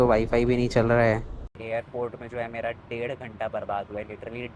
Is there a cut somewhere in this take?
yes; 1 cut; at 1.6 s

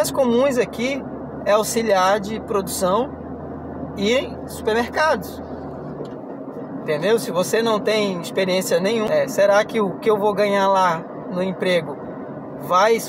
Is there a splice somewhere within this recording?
yes; 1 cut; at 9.1 s

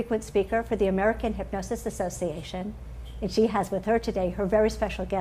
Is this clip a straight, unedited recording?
yes; 0 cuts

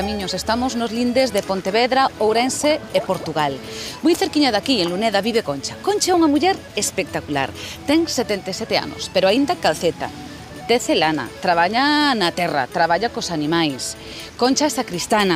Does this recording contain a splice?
no; 0 cuts

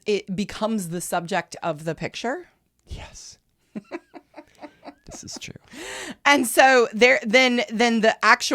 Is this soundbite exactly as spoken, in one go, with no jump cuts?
yes; 0 cuts

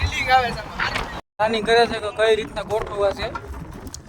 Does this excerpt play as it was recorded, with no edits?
no; 1 cut; at 1.2 s

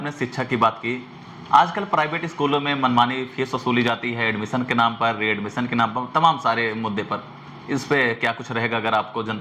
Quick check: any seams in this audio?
no; 0 cuts

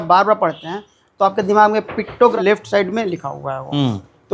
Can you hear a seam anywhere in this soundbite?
yes; 1 cut; at 2.3 s

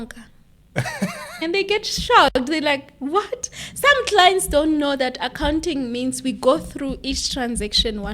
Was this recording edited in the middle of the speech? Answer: yes; 1 cut; at 1.4 s

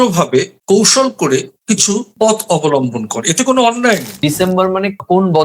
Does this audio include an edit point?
yes; 1 cut; at 4.2 s

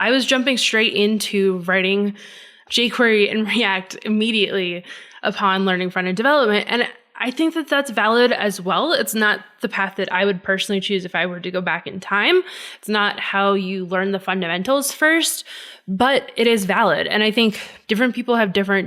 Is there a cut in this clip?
yes; 1 cut; at 17.7 s

